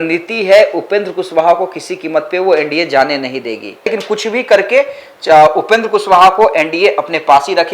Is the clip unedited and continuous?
no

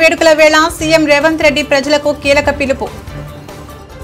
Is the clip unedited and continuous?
yes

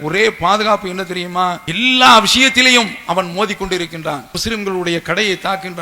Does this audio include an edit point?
yes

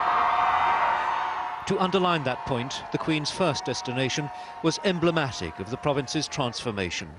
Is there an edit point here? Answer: yes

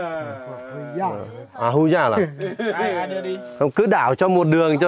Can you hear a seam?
no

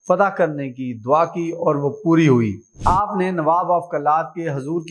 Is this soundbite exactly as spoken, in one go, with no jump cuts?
no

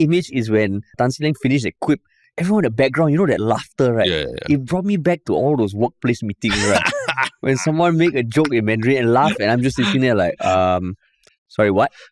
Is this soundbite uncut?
no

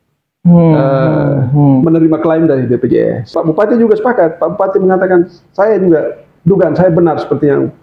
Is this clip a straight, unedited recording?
no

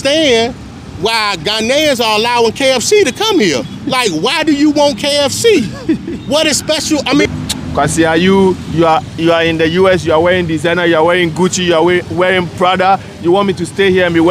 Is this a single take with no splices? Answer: no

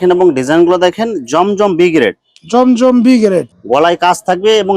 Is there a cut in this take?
yes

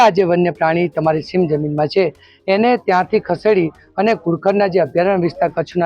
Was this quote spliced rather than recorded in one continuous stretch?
no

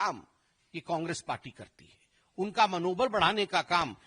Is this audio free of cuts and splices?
yes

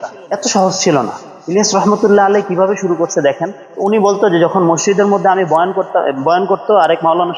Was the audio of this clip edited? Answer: no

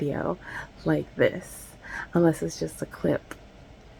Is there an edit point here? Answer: no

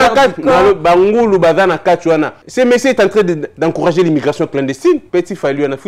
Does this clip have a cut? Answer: yes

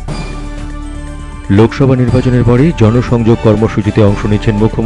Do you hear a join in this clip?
yes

